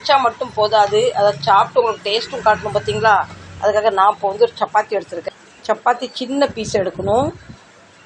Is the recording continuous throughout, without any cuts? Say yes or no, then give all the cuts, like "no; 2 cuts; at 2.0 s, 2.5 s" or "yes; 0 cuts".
yes; 0 cuts